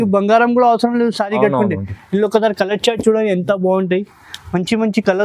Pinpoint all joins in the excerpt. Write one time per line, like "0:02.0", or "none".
none